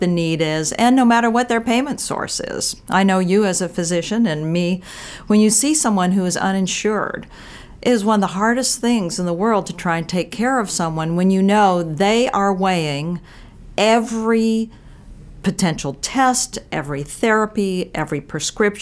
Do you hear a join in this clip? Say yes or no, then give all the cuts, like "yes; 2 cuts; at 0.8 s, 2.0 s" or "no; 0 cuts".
no; 0 cuts